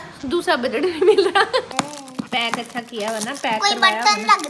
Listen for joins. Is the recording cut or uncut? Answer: cut